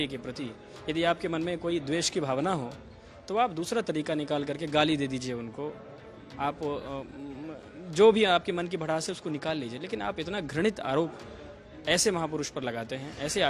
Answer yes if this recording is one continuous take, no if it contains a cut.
yes